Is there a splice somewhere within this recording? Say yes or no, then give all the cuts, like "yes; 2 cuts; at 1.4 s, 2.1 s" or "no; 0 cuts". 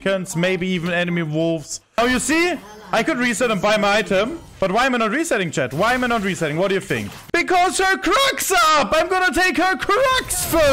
yes; 2 cuts; at 2.0 s, 7.1 s